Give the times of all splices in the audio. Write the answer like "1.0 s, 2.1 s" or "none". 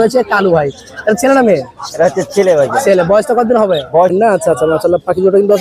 4.1 s